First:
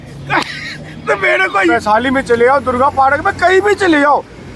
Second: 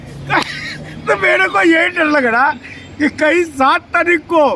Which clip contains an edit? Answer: first; 1 cut; at 1.7 s

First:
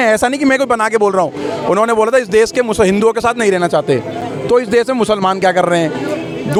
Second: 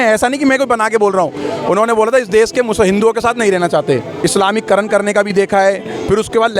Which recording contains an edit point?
second; 1 cut; at 4.1 s

